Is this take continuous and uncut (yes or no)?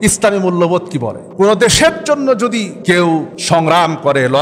no